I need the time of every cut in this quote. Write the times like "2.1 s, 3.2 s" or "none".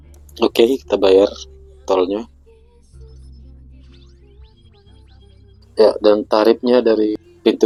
none